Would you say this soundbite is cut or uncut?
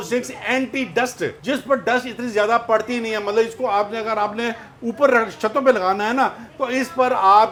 uncut